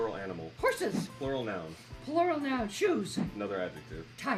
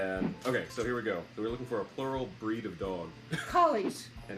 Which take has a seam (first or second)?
second